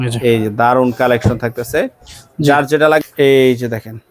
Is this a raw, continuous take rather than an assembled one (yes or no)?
no